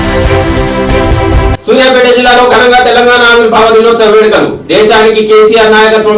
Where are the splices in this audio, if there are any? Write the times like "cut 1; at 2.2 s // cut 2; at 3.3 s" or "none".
cut 1; at 1.5 s